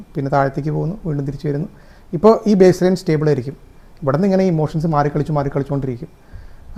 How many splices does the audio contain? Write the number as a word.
zero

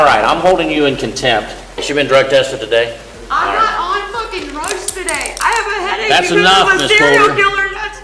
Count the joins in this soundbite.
two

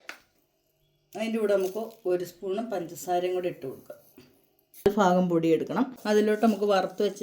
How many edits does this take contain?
two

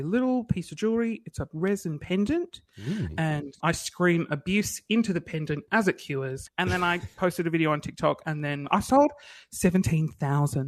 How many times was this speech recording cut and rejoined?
three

